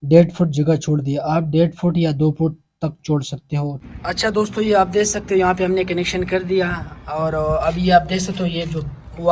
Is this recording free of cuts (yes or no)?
no